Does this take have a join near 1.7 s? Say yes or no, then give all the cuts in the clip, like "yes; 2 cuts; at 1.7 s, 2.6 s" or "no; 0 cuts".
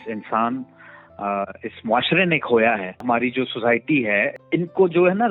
no; 2 cuts; at 3.0 s, 4.3 s